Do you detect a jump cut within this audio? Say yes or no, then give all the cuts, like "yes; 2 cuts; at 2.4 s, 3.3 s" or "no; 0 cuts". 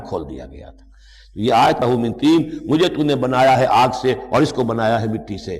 yes; 1 cut; at 1.8 s